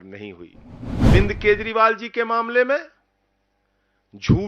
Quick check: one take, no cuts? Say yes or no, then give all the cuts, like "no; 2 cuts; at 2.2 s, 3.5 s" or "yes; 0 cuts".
no; 1 cut; at 1.1 s